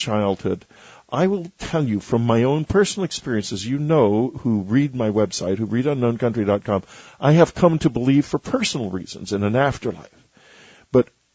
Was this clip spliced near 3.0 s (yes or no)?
yes